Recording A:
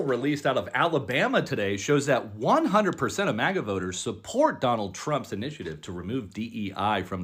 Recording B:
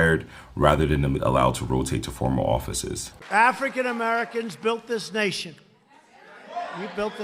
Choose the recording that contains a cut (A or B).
B